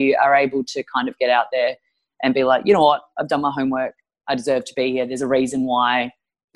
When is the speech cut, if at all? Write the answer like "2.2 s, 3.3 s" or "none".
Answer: none

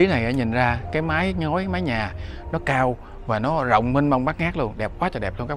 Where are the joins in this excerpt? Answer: none

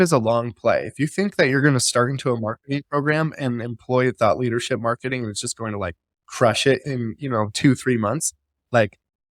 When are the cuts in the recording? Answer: none

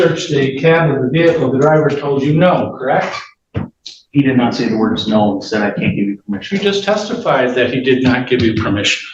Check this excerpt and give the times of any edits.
none

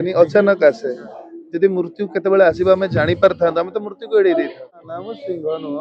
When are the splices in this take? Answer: 4.8 s

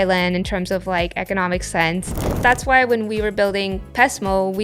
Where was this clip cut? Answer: 2.4 s

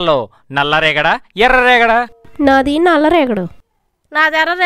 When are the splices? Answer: 2.1 s

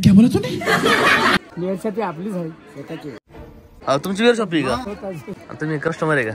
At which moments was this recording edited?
1.5 s, 3.7 s, 5.3 s

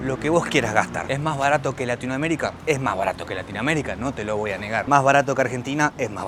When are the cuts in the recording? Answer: none

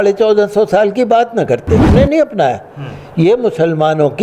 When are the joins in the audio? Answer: 1.9 s

